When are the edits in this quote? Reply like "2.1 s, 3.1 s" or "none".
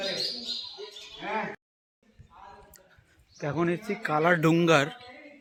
none

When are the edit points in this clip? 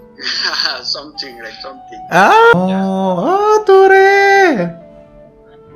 2.5 s

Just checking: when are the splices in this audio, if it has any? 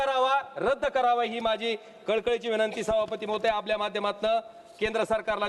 none

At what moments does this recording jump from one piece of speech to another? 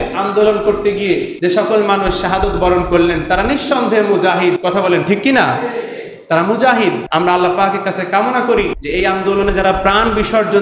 1.3 s, 4.6 s, 7.0 s, 8.8 s

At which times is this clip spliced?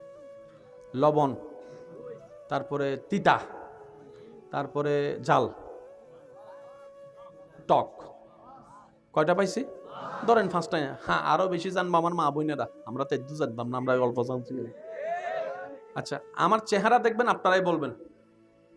0.9 s, 6.2 s, 7.5 s

